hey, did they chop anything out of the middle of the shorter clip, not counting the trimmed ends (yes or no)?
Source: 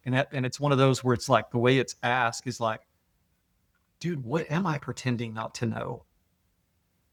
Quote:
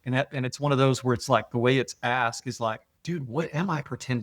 yes